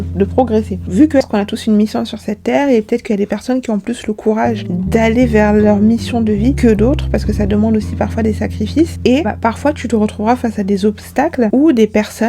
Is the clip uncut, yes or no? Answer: no